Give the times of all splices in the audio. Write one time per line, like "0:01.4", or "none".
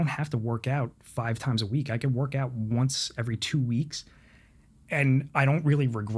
none

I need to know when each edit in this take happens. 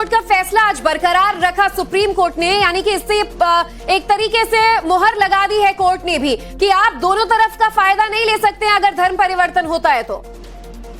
0:06.5

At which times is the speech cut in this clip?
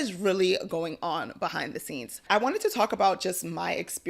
0:02.2

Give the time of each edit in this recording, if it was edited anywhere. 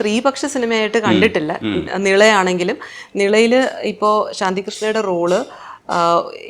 none

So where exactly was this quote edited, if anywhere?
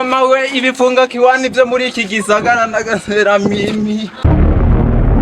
0:04.2

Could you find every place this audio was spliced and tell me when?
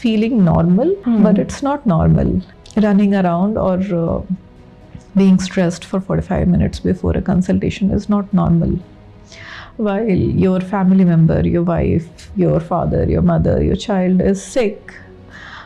0:01.0
0:02.6

